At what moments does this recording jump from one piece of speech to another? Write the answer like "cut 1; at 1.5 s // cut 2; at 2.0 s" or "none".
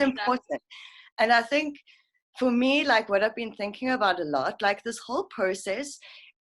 none